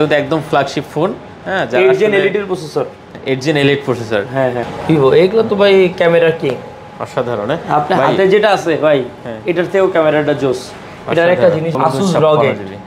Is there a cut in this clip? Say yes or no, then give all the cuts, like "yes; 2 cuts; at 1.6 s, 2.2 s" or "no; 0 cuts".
yes; 2 cuts; at 4.7 s, 11.7 s